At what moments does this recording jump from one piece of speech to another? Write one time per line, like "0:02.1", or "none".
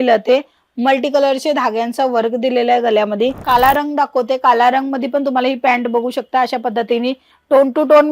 0:03.4